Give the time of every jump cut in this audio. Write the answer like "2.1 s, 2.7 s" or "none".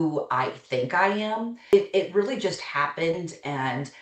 1.6 s